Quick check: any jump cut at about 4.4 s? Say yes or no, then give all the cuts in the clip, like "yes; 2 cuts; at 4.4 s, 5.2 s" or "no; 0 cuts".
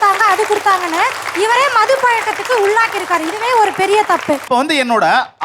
yes; 1 cut; at 4.4 s